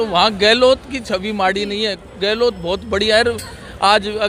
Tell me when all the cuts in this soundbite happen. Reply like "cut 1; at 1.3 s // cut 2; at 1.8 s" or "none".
none